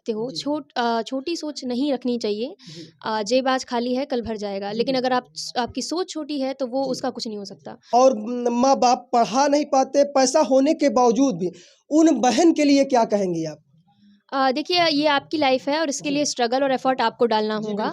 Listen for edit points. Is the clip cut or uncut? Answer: cut